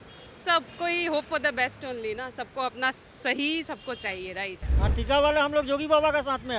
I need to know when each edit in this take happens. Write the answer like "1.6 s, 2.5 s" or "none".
4.7 s